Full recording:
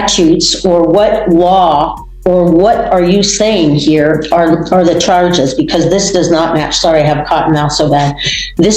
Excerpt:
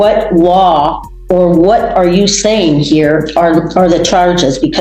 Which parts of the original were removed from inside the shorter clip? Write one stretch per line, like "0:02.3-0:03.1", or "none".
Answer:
none